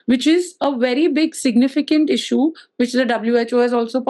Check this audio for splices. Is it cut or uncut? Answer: uncut